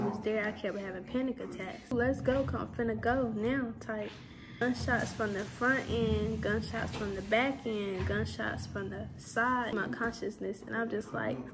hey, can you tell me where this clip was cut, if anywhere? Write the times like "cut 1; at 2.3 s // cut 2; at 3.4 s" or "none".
cut 1; at 1.9 s // cut 2; at 4.6 s // cut 3; at 9.7 s